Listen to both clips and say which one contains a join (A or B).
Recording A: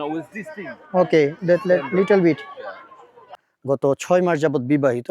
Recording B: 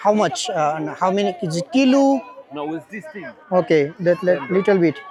A